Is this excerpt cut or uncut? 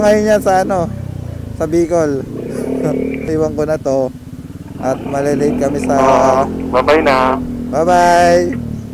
cut